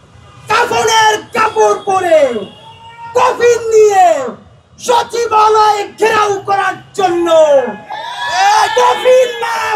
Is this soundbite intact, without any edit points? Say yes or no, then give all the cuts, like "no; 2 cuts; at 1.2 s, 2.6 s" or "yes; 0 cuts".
yes; 0 cuts